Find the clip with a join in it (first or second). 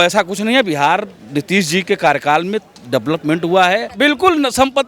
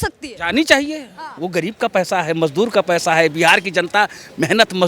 first